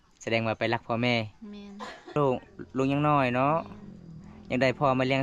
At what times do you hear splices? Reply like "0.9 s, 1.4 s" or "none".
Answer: 2.2 s